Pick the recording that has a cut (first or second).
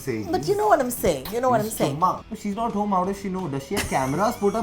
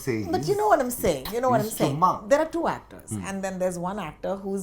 first